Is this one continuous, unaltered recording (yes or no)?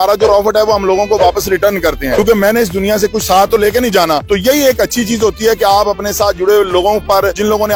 yes